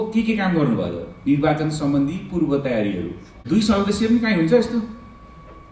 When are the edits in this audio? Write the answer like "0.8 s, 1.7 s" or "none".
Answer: 3.4 s